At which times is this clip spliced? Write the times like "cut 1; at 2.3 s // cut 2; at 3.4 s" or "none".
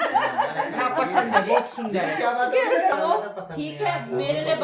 cut 1; at 3.0 s